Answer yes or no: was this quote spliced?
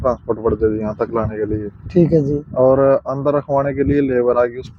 no